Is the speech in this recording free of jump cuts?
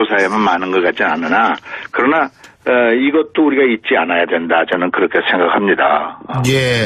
no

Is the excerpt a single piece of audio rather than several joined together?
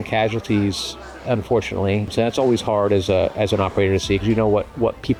yes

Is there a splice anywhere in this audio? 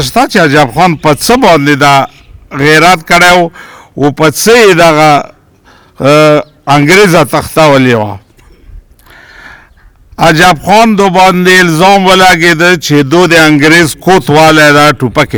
no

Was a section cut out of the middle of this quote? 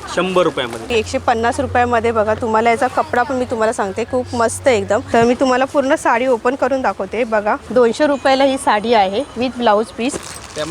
yes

